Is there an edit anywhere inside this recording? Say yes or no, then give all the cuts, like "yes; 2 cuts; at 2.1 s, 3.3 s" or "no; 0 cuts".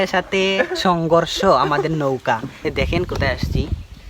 yes; 1 cut; at 2.5 s